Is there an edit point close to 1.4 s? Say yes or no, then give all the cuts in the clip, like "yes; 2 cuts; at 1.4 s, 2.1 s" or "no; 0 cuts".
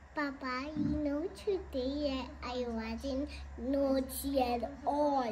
no; 0 cuts